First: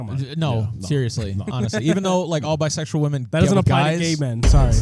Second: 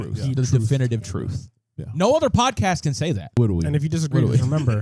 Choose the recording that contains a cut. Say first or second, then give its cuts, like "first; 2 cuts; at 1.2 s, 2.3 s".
second; 1 cut; at 3.3 s